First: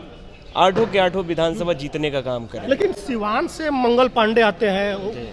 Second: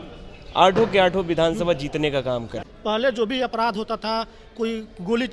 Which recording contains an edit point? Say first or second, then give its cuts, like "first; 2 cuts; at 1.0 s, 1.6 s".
second; 1 cut; at 2.6 s